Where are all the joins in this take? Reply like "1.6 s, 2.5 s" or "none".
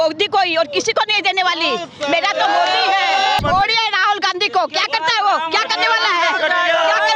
3.4 s